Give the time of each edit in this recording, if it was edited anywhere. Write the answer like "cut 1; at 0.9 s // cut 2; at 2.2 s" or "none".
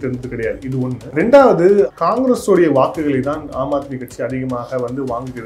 cut 1; at 1.0 s // cut 2; at 1.9 s